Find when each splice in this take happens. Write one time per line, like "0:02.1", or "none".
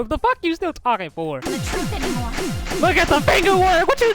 0:01.4